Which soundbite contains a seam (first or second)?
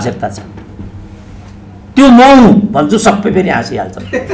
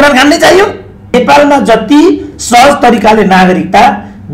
second